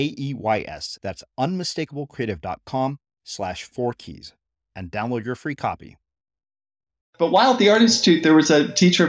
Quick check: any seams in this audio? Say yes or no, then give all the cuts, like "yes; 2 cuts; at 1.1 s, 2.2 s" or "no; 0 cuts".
yes; 1 cut; at 7.1 s